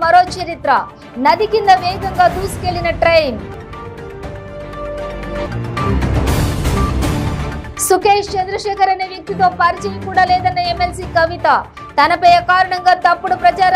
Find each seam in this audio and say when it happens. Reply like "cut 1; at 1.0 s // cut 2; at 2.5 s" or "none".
none